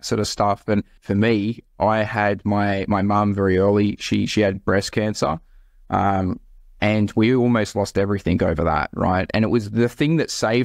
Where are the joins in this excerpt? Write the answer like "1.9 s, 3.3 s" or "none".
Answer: 0.9 s